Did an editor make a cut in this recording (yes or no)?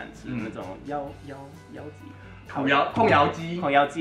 no